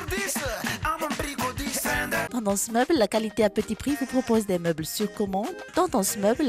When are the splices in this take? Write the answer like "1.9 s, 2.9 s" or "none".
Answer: 2.3 s